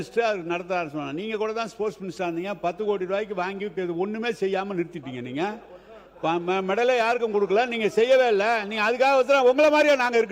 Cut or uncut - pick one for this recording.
uncut